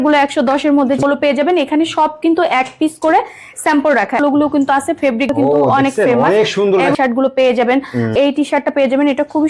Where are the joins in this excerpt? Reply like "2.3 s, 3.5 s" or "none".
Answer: 1.0 s, 4.2 s, 5.3 s, 6.9 s, 8.1 s

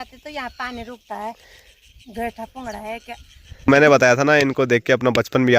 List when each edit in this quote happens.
3.7 s

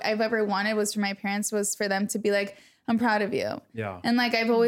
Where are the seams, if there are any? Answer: none

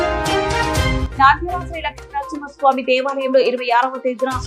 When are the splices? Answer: 1.0 s

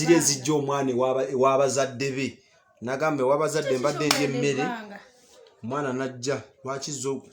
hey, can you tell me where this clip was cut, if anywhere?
none

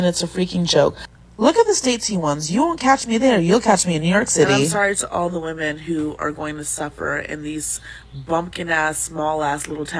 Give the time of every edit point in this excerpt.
3.0 s, 4.7 s

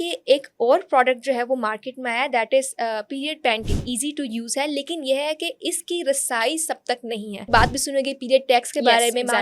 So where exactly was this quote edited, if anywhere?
3.9 s, 7.5 s

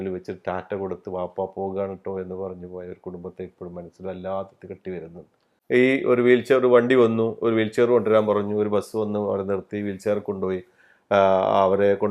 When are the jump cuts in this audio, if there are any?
5.5 s

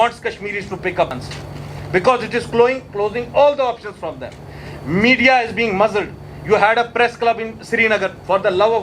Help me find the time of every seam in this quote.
1.1 s

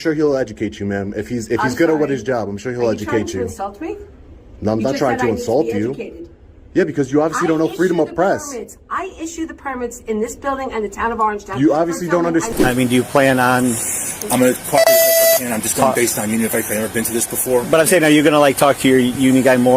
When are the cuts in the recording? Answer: 12.5 s

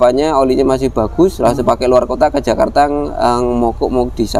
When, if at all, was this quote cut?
none

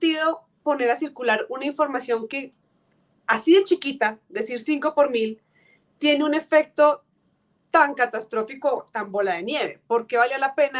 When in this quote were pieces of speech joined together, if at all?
none

